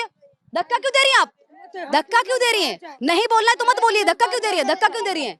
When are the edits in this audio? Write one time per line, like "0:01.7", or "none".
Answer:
none